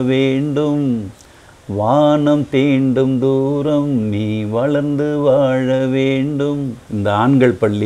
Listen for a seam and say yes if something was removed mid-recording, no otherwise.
yes